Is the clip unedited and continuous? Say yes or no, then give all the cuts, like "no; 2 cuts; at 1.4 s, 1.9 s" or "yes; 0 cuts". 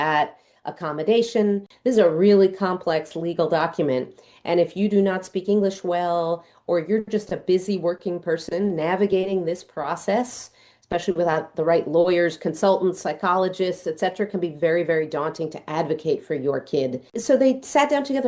no; 2 cuts; at 1.7 s, 17.1 s